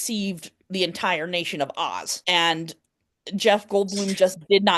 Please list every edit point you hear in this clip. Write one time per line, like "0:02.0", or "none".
0:02.1